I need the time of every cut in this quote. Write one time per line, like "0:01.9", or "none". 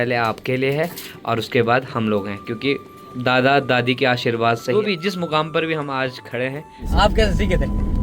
0:04.9
0:06.9